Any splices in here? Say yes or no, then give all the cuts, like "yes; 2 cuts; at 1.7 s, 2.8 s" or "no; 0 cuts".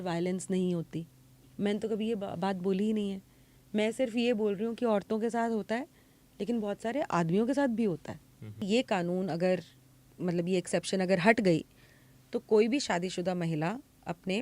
yes; 1 cut; at 8.6 s